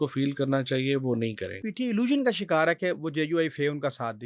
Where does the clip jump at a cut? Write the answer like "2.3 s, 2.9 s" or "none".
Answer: 1.7 s